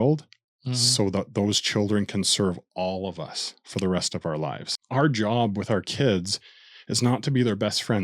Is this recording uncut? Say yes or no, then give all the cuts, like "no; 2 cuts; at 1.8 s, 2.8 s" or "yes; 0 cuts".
no; 1 cut; at 4.8 s